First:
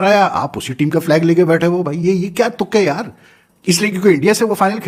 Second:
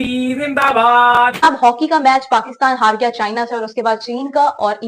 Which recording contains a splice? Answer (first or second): second